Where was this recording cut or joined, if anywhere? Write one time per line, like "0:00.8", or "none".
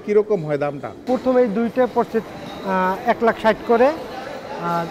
0:01.0